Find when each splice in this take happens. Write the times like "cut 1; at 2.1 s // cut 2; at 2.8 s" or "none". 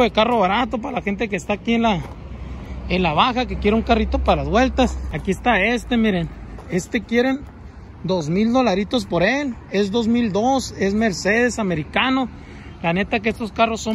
cut 1; at 5.1 s // cut 2; at 6.5 s